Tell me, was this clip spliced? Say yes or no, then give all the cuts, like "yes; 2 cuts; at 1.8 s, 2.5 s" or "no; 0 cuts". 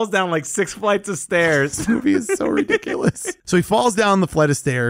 yes; 1 cut; at 3.3 s